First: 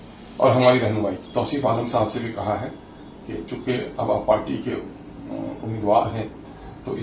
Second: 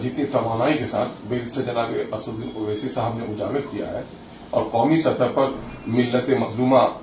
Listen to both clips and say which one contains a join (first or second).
first